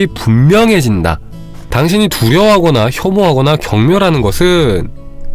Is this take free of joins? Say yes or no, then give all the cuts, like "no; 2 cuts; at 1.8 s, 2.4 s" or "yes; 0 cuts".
no; 1 cut; at 1.6 s